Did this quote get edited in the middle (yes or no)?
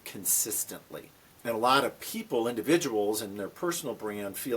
yes